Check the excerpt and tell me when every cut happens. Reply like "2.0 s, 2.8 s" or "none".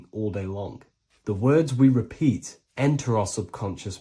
none

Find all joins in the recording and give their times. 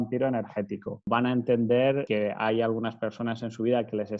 1.1 s, 2.1 s

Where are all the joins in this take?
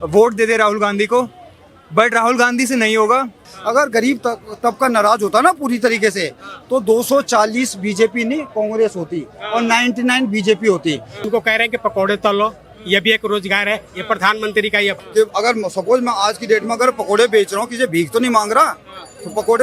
3.5 s, 11.1 s, 15.0 s

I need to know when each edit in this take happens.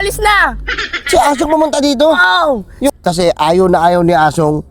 2.9 s

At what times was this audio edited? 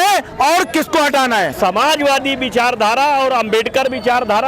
1.5 s

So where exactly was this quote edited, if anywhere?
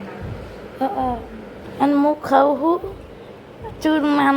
1.6 s

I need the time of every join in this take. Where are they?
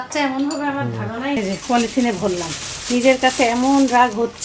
1.4 s

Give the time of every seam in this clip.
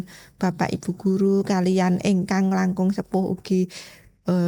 none

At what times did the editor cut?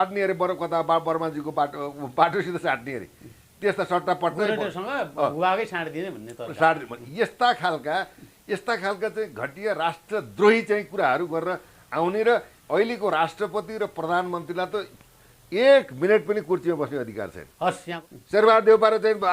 18.0 s

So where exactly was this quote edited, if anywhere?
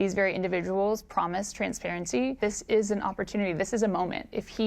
2.4 s

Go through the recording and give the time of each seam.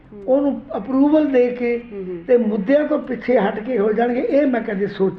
none

